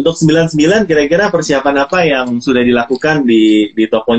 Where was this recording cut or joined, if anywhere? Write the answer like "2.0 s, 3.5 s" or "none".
none

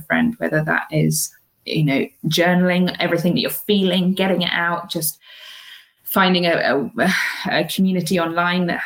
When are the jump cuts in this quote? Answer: none

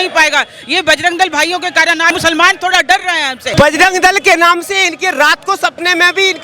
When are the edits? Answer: 2.1 s, 3.5 s

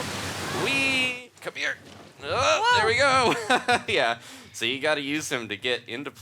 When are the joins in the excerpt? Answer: 1.1 s

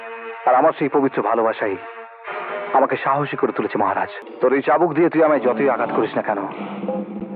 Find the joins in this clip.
4.2 s

